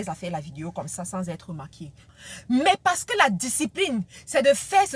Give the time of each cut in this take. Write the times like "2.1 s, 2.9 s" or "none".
2.1 s